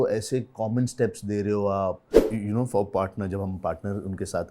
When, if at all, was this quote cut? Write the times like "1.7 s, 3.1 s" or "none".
2.1 s